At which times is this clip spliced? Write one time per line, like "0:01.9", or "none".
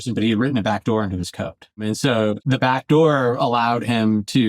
0:02.1